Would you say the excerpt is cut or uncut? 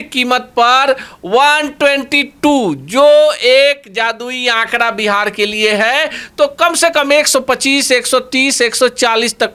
uncut